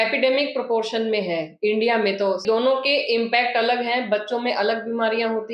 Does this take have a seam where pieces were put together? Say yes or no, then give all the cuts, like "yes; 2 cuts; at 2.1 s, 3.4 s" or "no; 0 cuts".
yes; 1 cut; at 2.4 s